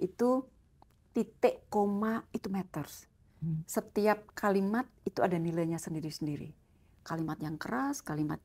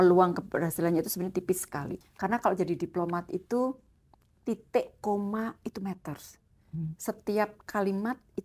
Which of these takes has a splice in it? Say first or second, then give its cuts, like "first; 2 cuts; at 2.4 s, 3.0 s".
second; 1 cut; at 2.0 s